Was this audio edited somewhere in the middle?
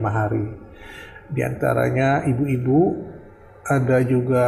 no; 0 cuts

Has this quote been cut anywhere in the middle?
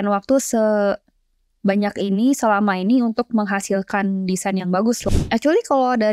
yes; 1 cut; at 5.0 s

